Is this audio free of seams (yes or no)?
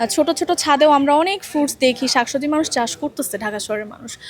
yes